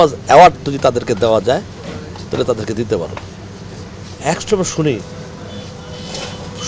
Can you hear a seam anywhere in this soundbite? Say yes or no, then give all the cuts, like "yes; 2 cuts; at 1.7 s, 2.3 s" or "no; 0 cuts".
no; 0 cuts